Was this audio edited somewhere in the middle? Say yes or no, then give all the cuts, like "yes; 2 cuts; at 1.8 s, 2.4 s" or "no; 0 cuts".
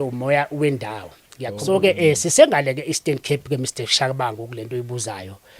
yes; 1 cut; at 1.5 s